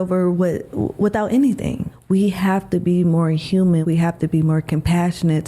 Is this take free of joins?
no; 2 cuts; at 1.9 s, 3.8 s

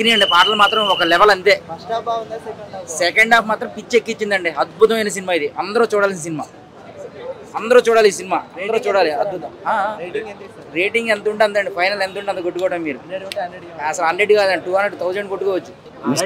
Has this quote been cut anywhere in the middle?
no; 0 cuts

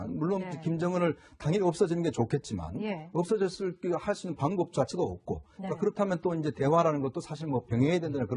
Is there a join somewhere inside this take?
no; 0 cuts

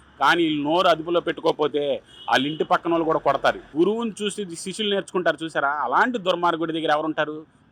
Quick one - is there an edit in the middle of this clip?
yes; 1 cut; at 3.6 s

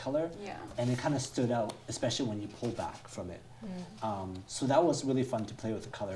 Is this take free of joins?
yes; 0 cuts

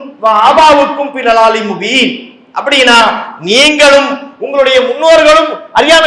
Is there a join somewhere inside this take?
no; 0 cuts

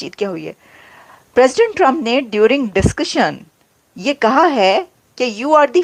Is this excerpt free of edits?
yes; 0 cuts

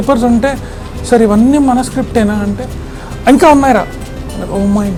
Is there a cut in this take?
no; 0 cuts

